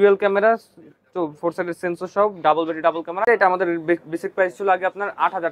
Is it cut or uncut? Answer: cut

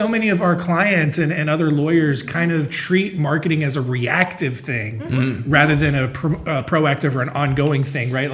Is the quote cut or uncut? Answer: uncut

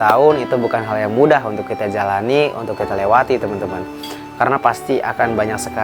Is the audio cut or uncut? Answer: uncut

